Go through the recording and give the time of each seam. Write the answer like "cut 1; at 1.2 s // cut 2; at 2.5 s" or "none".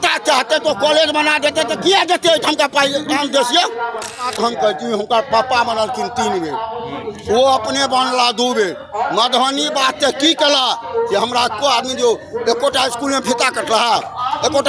cut 1; at 4.3 s